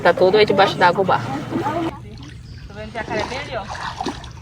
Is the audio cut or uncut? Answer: cut